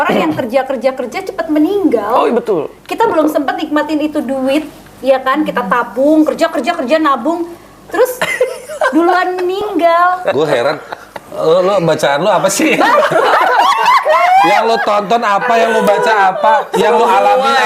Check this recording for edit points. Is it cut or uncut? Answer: uncut